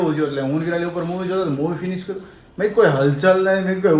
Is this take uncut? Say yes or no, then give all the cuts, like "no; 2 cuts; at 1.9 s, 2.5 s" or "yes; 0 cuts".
yes; 0 cuts